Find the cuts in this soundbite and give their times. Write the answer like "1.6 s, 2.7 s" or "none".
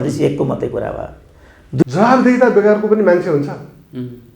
1.8 s